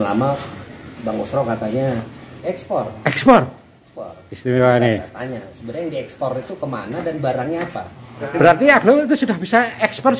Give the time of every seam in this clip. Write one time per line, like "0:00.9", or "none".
0:02.5
0:08.4